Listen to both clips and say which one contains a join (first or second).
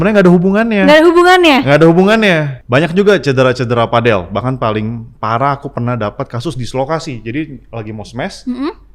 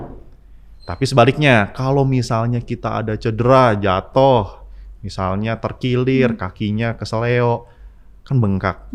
first